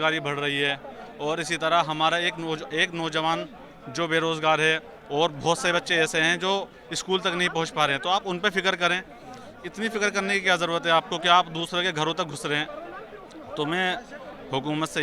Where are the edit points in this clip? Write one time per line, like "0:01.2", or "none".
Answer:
none